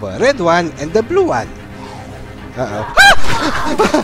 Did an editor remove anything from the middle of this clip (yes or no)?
no